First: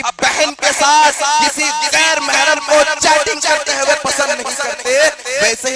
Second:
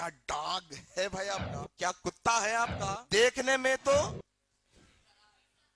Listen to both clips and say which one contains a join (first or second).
second